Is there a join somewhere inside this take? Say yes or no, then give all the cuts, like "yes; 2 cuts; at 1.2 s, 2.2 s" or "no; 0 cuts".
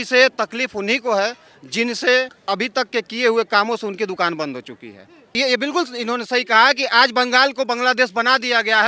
yes; 2 cuts; at 2.4 s, 5.3 s